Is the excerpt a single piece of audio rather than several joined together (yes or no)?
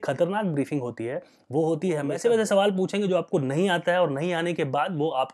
no